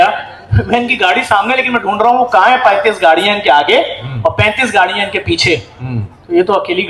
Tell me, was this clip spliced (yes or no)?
no